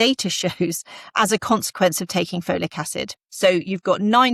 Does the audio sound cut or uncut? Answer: uncut